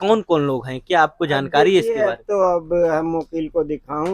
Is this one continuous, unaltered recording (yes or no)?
yes